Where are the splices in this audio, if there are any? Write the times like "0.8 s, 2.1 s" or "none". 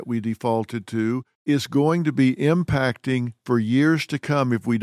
1.3 s